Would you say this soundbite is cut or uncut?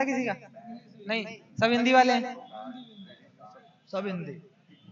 uncut